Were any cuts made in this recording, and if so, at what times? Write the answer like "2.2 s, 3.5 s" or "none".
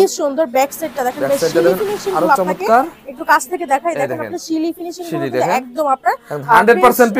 none

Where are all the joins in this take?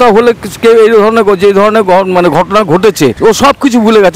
3.2 s

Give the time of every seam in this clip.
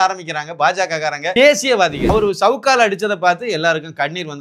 1.2 s, 2.1 s

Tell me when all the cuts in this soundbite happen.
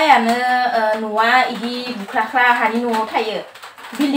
none

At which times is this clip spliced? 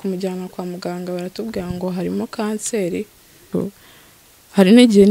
3.4 s

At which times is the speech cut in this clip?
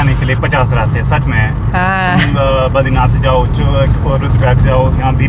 none

